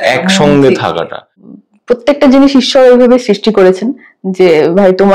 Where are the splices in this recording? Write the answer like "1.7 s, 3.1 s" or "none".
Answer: 1.3 s